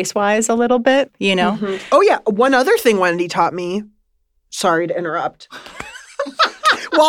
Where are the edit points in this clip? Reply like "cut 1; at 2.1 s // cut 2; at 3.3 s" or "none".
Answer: cut 1; at 1.4 s